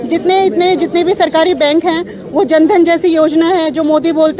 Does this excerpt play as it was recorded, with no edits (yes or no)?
yes